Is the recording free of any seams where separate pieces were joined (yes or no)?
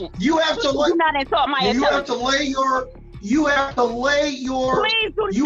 yes